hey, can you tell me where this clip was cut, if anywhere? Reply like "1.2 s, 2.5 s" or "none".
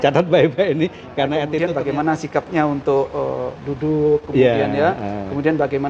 1.5 s